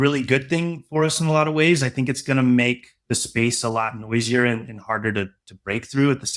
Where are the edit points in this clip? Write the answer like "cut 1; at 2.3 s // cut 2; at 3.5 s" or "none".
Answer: cut 1; at 2.9 s